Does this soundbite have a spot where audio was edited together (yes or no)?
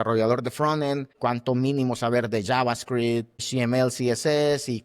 yes